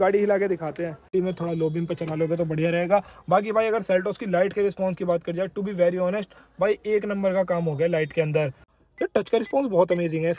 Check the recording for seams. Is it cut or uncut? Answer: cut